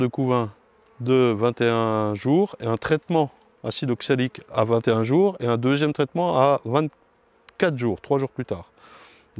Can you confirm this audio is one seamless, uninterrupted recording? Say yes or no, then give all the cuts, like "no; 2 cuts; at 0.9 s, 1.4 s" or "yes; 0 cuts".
yes; 0 cuts